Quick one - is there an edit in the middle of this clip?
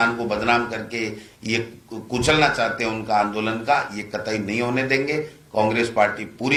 no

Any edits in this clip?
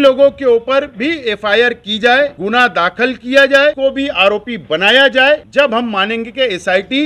yes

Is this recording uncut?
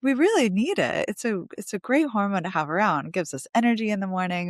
yes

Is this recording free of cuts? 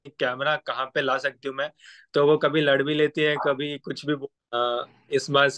no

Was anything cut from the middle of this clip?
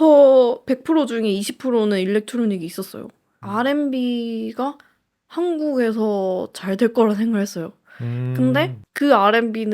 yes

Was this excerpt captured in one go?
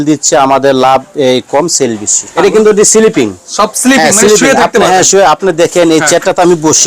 no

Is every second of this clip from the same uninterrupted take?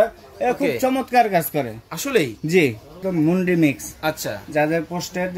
no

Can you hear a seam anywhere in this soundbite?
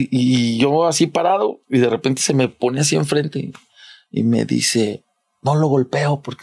no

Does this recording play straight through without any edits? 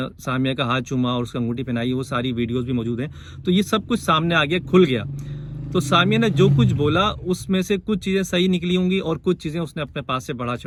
yes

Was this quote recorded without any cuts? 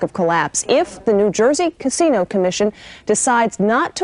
yes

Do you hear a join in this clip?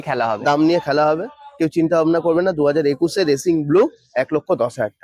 no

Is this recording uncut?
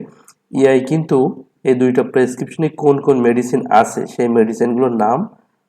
yes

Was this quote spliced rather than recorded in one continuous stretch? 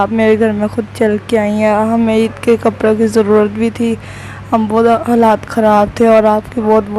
no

